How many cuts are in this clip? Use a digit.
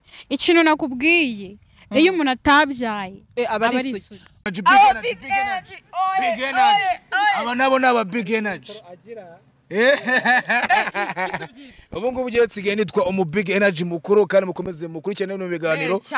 1